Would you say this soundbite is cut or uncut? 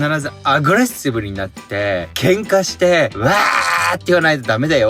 cut